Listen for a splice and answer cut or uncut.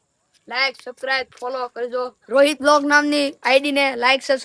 uncut